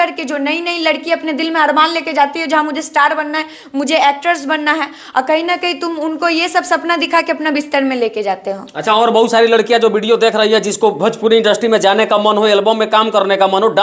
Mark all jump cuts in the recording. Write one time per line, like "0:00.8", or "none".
none